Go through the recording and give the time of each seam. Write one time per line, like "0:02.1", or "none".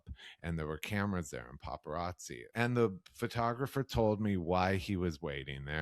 0:02.3